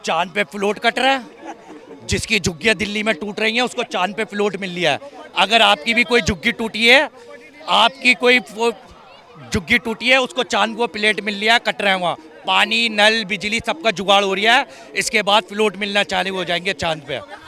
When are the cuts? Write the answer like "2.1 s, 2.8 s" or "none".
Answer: none